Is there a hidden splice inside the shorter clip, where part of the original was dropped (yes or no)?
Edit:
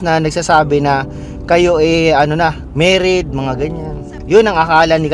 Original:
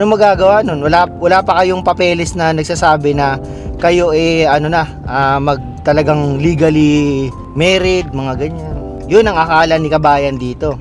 yes